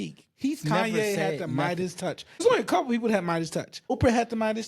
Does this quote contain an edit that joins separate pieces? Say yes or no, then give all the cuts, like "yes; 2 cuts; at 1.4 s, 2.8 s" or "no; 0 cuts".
yes; 2 cuts; at 2.4 s, 3.9 s